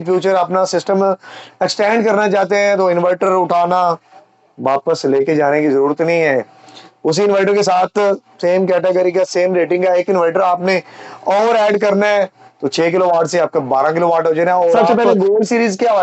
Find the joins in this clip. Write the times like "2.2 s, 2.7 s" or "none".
14.9 s